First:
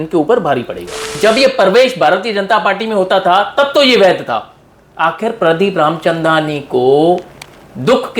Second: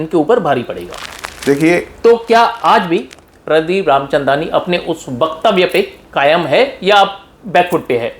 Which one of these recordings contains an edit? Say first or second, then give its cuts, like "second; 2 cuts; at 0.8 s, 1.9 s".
first; 1 cut; at 1.1 s